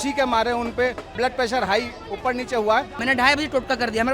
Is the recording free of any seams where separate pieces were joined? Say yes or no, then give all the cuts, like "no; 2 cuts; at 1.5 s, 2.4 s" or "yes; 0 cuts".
no; 2 cuts; at 1.1 s, 3.0 s